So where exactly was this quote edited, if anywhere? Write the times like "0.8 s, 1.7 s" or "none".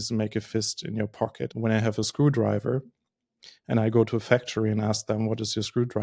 1.5 s

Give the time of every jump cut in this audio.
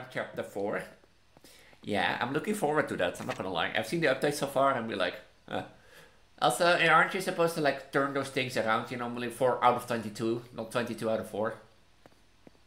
none

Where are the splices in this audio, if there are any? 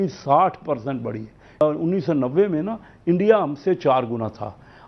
1.6 s

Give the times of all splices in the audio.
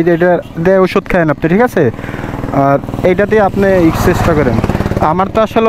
none

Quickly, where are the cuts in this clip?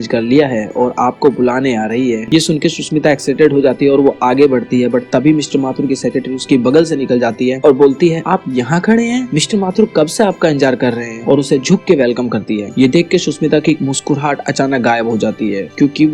2.2 s

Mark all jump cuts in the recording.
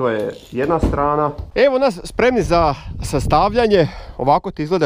1.4 s

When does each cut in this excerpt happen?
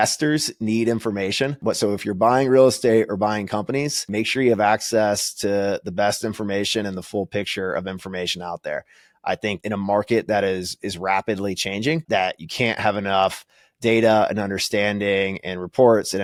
none

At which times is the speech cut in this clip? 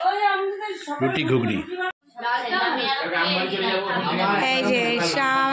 2.0 s

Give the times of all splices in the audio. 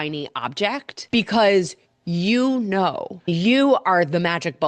0.9 s, 3.3 s

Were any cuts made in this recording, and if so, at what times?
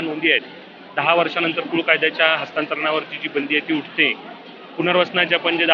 none

